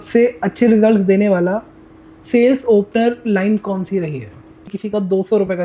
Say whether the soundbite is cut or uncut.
cut